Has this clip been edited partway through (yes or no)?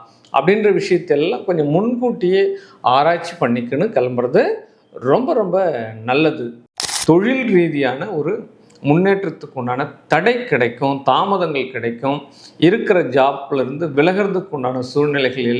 yes